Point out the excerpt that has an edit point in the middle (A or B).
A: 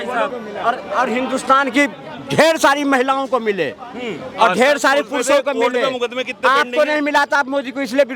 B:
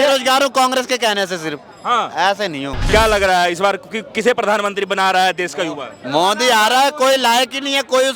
B